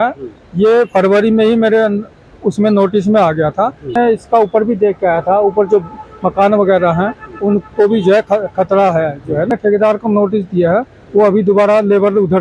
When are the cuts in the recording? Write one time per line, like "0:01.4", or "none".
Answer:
0:03.9
0:09.5